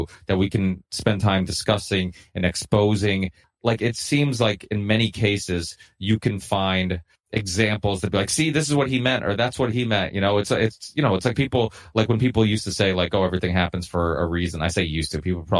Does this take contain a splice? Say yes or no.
yes